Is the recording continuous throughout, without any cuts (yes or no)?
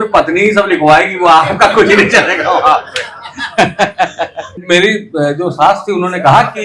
no